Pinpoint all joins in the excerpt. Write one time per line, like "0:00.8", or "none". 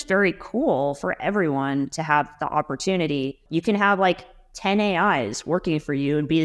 0:03.4